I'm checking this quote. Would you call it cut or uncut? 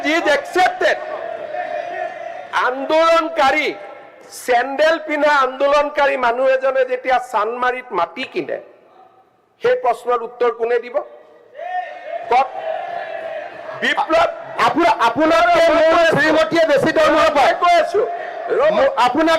uncut